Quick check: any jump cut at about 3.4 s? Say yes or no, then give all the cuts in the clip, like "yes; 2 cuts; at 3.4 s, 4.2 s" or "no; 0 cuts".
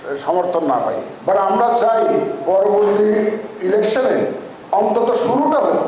no; 1 cut; at 1.1 s